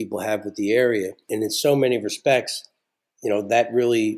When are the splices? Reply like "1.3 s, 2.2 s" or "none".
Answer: 1.3 s